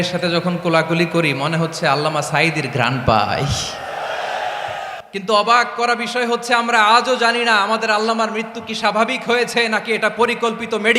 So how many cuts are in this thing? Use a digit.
1